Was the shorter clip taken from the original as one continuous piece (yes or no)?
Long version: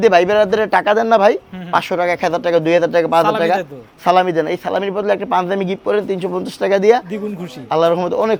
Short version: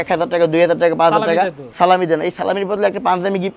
no